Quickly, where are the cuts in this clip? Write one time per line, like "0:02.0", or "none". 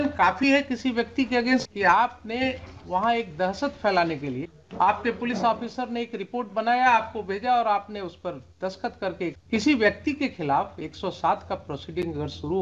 0:01.6
0:04.6
0:09.4